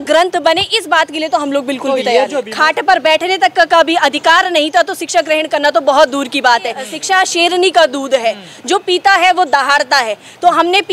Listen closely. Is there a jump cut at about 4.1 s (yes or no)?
no